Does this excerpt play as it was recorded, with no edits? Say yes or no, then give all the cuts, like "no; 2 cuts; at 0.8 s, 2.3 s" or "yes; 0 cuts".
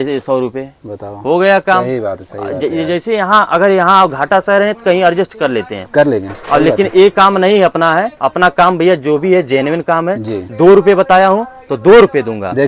yes; 0 cuts